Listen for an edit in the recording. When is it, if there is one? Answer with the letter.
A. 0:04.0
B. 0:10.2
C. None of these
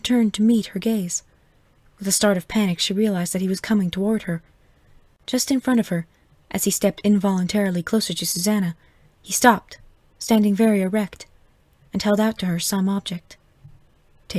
B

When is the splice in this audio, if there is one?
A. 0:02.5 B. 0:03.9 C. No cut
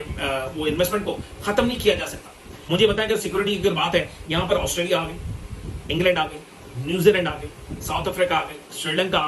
A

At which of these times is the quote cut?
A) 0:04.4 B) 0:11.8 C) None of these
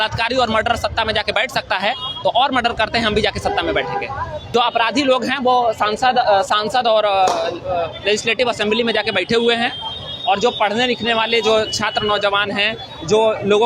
A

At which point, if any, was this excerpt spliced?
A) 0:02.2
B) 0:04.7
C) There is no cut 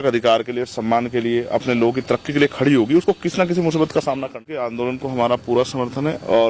B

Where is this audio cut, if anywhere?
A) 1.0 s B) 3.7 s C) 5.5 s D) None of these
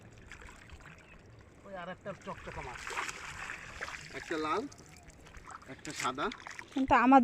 B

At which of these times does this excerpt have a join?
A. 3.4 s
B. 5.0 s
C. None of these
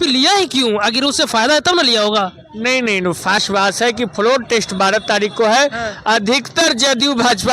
A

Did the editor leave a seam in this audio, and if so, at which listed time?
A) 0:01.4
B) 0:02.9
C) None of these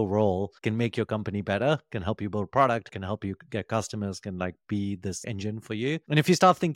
B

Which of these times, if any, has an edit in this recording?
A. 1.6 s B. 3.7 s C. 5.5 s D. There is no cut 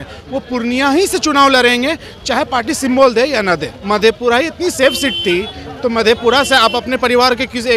B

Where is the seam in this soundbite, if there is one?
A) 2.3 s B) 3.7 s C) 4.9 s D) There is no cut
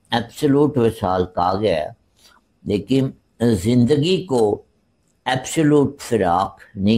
D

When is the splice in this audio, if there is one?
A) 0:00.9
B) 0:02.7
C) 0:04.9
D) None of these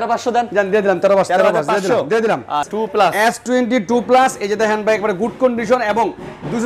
B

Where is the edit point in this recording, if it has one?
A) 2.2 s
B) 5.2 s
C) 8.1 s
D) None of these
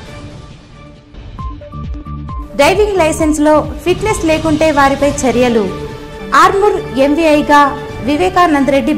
A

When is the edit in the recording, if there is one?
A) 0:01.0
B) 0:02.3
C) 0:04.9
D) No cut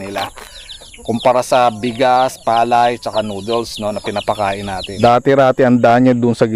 C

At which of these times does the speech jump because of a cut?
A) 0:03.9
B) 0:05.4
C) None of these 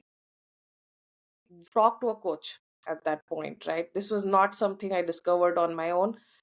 C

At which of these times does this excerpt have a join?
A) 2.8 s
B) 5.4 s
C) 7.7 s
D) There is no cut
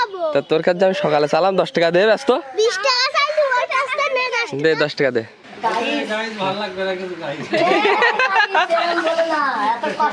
B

